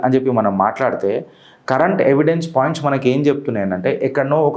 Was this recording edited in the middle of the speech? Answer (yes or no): no